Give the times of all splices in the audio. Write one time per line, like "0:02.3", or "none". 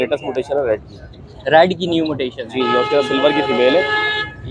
none